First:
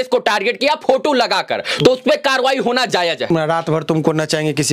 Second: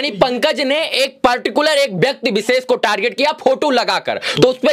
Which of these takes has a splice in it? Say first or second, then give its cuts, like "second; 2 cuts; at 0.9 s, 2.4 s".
first; 1 cut; at 3.3 s